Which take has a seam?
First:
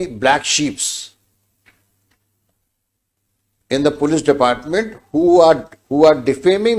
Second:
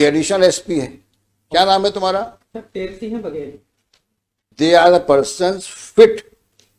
second; 1 cut; at 4.5 s

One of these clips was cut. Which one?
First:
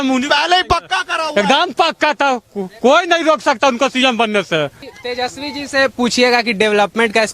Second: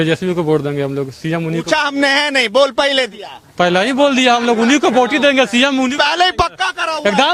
first; 1 cut; at 4.8 s

